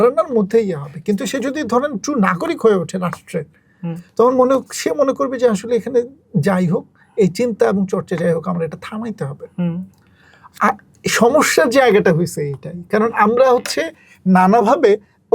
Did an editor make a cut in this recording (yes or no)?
no